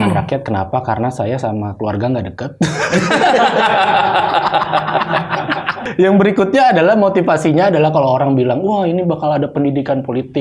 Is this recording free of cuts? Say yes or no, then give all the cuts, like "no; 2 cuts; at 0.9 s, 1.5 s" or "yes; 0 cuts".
no; 1 cut; at 5.8 s